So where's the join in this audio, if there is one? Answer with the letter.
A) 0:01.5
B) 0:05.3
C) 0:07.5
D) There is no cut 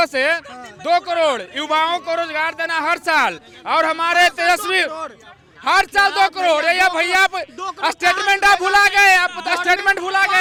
D